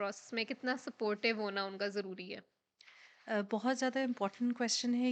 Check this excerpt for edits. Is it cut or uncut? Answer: uncut